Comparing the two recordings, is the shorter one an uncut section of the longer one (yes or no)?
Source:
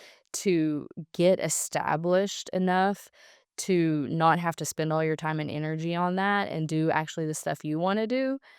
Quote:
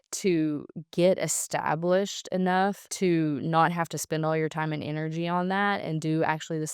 no